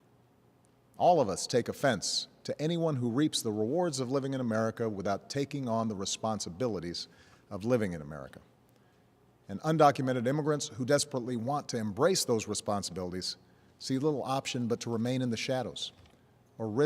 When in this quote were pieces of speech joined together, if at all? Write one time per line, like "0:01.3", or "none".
0:06.7